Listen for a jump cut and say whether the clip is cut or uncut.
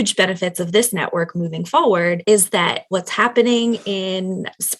cut